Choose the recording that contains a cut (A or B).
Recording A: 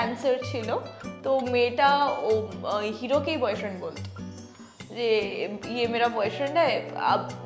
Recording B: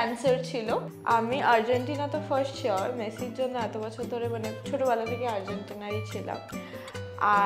B